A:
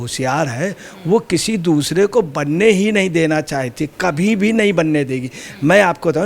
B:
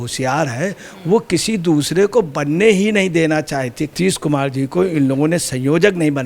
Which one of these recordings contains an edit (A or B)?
B